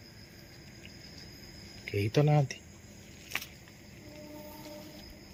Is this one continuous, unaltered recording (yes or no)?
yes